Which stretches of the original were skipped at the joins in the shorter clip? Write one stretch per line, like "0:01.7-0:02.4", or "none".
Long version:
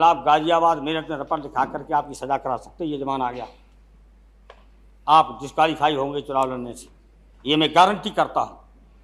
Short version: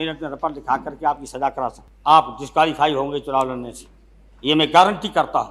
0:02.7-0:04.8